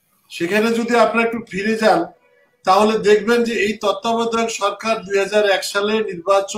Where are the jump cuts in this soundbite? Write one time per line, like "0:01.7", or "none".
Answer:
none